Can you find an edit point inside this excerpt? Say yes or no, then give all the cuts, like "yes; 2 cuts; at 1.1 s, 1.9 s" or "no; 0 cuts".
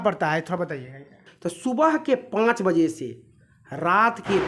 yes; 1 cut; at 1.3 s